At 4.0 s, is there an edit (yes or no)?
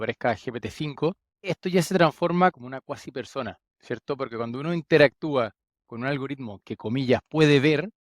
no